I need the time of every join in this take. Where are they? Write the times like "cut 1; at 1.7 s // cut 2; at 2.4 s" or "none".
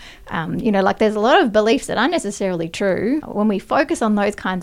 cut 1; at 3.3 s